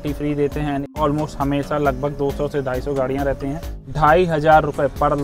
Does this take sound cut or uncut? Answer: cut